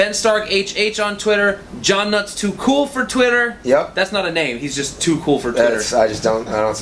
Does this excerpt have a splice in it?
no; 0 cuts

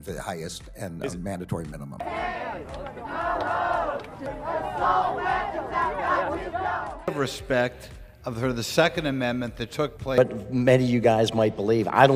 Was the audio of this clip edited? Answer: no; 0 cuts

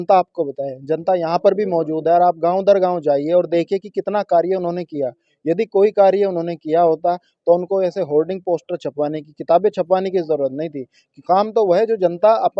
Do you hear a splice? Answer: no; 0 cuts

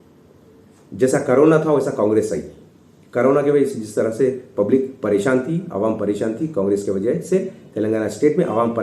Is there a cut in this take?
no; 0 cuts

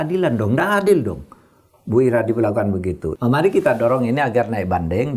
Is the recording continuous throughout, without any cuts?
no; 1 cut; at 3.1 s

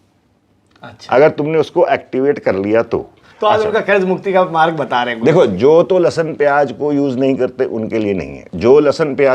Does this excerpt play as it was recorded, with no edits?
no; 1 cut; at 3.2 s

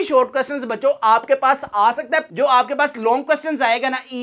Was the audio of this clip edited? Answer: yes; 1 cut; at 2.3 s

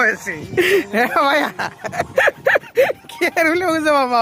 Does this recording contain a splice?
no; 0 cuts

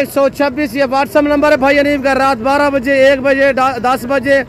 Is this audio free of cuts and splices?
yes; 0 cuts

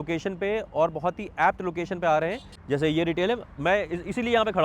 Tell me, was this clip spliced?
yes; 1 cut; at 2.5 s

